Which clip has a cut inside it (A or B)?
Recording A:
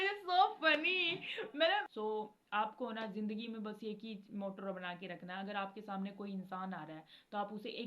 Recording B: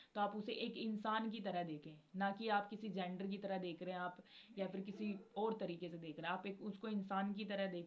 A